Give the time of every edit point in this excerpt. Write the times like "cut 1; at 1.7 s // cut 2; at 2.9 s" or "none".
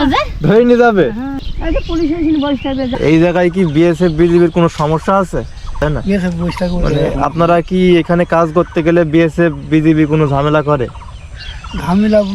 cut 1; at 2.9 s // cut 2; at 5.8 s